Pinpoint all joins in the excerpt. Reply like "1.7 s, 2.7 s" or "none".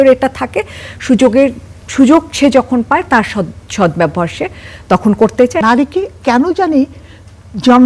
5.6 s

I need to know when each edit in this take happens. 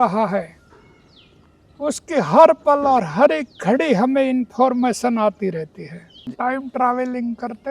6.3 s

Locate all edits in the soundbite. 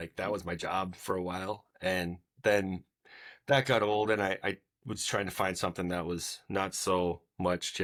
none

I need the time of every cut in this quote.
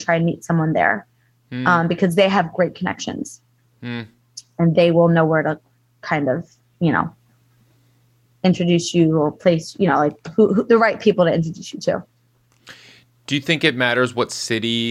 none

